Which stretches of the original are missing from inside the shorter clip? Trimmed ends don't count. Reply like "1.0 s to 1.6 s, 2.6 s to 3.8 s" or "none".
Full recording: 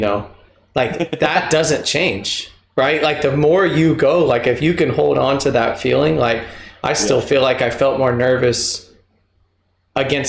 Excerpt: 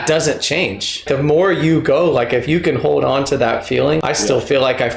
2.5 s to 3.2 s, 6.1 s to 6.8 s